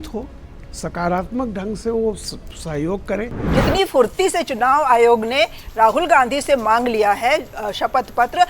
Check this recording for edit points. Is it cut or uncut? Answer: cut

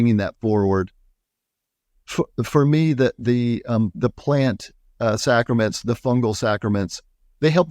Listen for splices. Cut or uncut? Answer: uncut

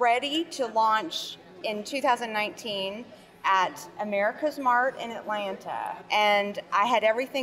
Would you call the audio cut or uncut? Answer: cut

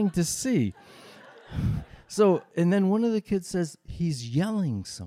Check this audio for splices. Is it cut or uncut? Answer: cut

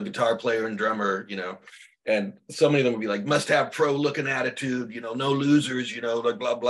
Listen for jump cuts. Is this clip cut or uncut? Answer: uncut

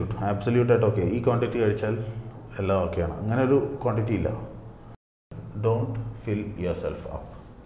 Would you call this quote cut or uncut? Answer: cut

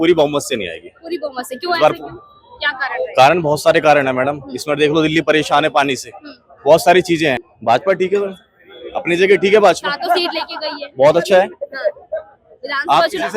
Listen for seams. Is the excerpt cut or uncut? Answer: cut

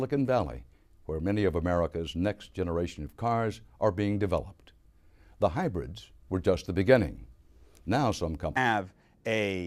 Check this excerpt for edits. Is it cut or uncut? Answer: uncut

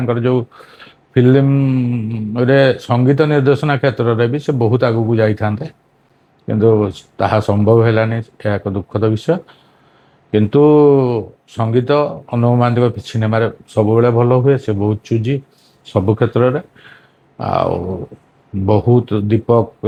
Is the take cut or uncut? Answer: uncut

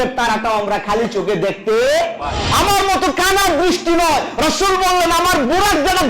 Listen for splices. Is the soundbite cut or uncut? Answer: cut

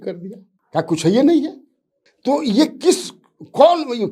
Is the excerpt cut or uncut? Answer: uncut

